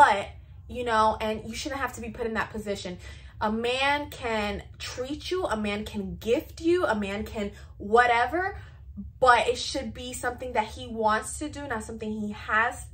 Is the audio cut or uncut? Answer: uncut